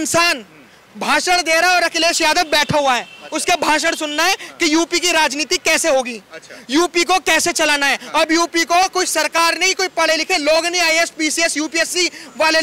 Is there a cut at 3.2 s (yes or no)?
no